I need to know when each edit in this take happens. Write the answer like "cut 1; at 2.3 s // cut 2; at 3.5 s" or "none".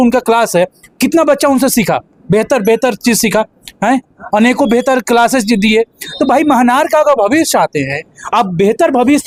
none